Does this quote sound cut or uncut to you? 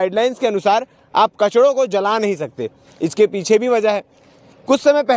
uncut